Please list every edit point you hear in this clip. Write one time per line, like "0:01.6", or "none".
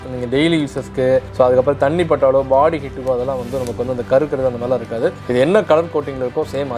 none